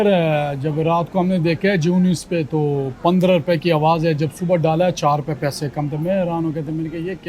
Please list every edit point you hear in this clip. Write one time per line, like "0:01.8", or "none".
none